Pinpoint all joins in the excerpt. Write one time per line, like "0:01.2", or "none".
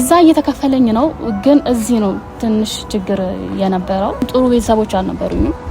0:04.3